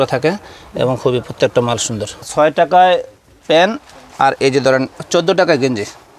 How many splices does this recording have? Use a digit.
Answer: 1